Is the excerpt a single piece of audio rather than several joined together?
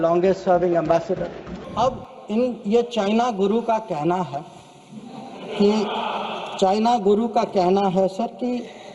no; 1 cut; at 1.5 s

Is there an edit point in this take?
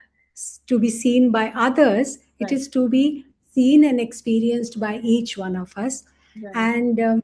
no; 0 cuts

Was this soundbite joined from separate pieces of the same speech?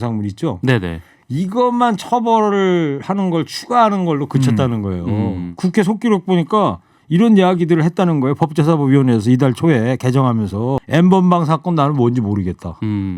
yes; 2 cuts; at 5.5 s, 10.8 s

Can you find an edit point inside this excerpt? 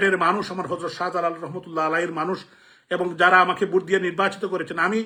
no; 0 cuts

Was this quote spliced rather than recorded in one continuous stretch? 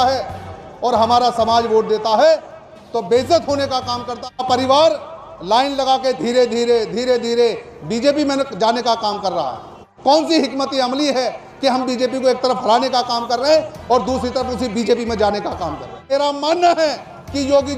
yes; 3 cuts; at 4.4 s, 9.9 s, 16.0 s

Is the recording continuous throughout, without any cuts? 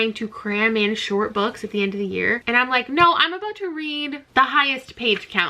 no; 2 cuts; at 2.4 s, 4.2 s

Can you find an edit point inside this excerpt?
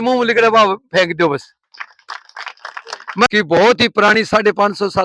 yes; 1 cut; at 3.3 s

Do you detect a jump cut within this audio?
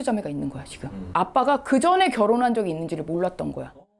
yes; 1 cut; at 1.1 s

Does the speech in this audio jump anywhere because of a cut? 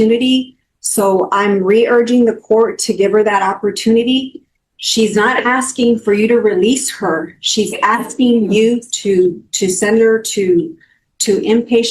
no; 0 cuts

